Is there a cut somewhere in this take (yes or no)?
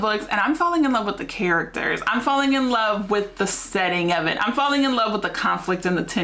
no